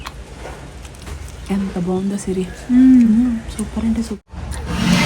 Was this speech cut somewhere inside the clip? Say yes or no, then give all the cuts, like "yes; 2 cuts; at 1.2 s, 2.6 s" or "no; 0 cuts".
yes; 1 cut; at 4.2 s